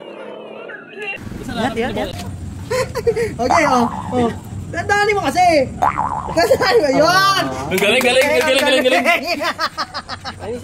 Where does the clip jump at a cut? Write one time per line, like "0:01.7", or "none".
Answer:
0:02.1